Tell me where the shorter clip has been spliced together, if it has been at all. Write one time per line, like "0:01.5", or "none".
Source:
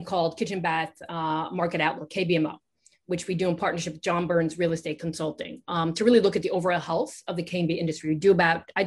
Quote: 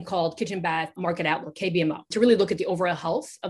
0:01.0
0:02.1